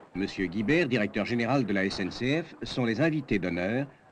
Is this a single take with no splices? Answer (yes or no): no